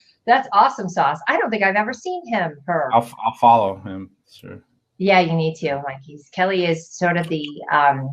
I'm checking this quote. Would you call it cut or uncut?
cut